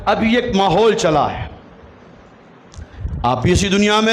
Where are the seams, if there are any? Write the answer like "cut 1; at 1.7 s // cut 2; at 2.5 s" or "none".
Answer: none